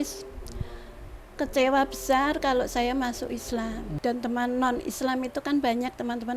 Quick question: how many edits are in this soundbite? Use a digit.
1